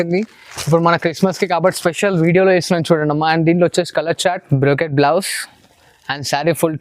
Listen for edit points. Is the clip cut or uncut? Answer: cut